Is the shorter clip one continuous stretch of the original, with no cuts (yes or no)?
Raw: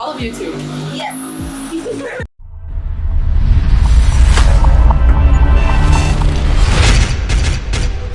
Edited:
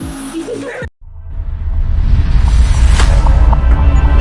yes